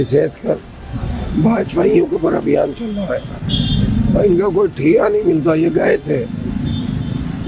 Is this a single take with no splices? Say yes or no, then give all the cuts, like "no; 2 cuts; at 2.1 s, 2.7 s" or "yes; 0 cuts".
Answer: yes; 0 cuts